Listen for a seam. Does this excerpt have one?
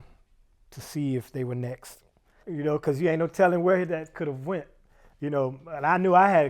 yes; 1 cut; at 2.4 s

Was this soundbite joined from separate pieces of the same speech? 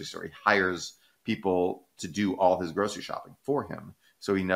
no; 0 cuts

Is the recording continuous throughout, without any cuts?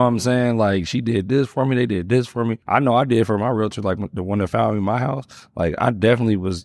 no; 1 cut; at 2.6 s

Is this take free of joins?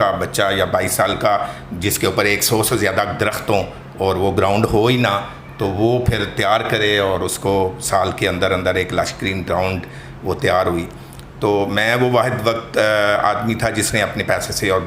yes; 0 cuts

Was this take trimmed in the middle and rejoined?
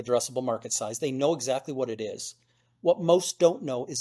no; 0 cuts

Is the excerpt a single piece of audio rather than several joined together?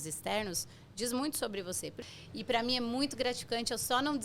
no; 1 cut; at 2.0 s

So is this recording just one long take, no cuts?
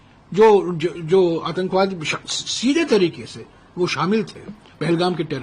yes; 0 cuts

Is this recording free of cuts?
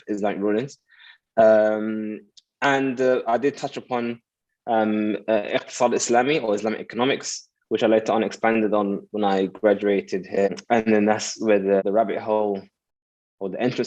no; 2 cuts; at 10.5 s, 11.8 s

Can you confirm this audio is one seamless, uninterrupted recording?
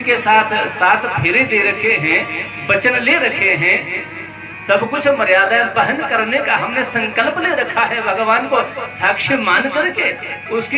yes; 0 cuts

